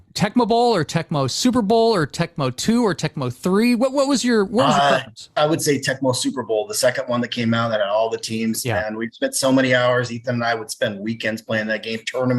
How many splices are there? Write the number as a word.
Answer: one